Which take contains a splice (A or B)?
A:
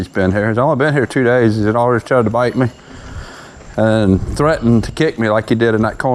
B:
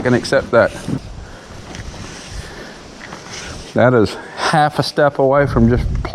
B